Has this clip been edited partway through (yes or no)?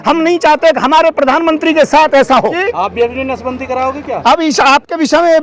yes